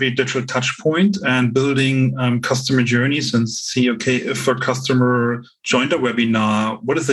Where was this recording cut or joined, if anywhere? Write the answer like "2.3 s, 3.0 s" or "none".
none